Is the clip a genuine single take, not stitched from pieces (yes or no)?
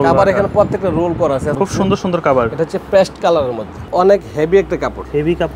no